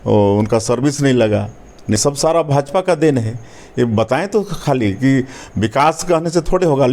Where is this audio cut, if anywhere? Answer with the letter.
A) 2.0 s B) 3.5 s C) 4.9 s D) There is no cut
A